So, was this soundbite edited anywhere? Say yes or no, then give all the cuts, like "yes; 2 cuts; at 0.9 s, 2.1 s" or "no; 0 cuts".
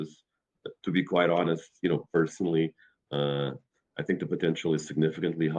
no; 0 cuts